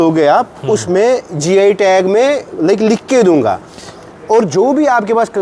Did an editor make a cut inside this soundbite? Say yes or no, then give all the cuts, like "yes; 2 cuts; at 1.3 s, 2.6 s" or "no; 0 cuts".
no; 0 cuts